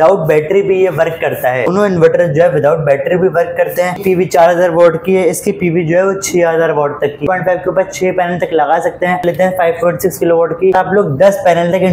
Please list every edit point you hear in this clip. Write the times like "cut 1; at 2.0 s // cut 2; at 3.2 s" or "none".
cut 1; at 1.7 s // cut 2; at 4.0 s // cut 3; at 7.2 s // cut 4; at 9.2 s // cut 5; at 10.7 s